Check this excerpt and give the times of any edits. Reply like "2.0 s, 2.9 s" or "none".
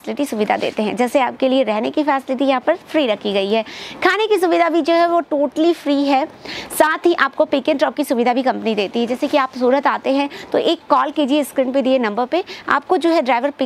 none